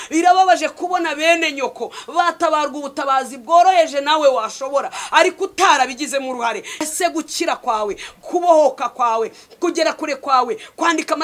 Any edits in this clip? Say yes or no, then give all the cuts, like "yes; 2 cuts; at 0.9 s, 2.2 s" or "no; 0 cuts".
yes; 1 cut; at 6.8 s